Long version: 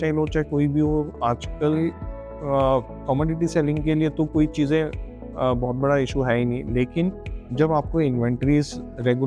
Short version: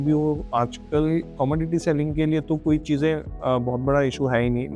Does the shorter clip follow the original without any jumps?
no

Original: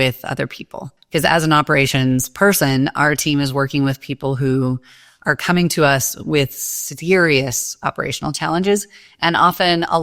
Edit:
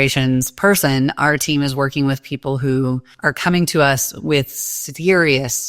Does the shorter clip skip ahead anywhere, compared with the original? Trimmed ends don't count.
yes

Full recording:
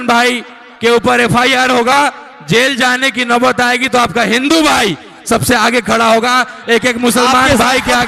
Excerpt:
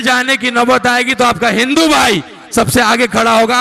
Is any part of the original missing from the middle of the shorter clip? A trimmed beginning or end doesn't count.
no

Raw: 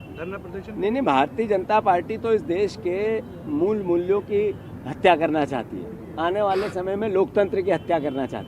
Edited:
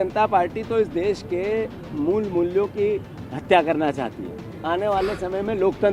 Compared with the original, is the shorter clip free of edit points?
yes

